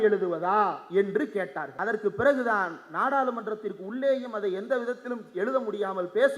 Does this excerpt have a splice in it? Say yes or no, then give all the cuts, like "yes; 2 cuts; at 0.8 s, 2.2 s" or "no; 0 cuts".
yes; 1 cut; at 1.7 s